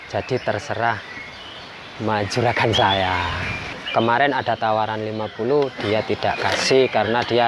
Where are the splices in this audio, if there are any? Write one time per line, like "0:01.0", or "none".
0:03.7